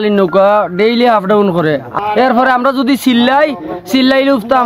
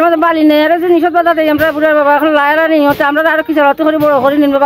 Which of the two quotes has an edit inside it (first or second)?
first